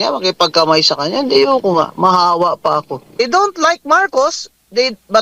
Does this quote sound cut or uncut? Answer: cut